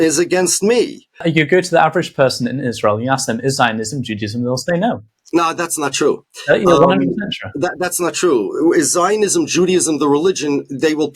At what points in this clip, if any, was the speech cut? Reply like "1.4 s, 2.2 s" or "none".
1.2 s